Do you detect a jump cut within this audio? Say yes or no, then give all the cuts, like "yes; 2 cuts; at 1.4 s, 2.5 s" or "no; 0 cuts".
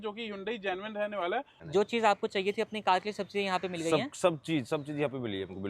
yes; 1 cut; at 1.6 s